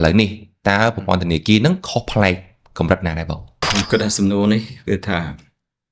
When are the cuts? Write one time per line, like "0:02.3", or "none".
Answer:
0:03.6